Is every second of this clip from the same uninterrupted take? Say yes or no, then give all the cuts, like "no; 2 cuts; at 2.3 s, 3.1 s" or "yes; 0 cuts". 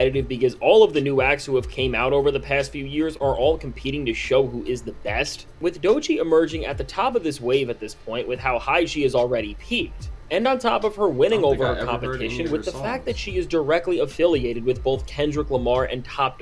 yes; 0 cuts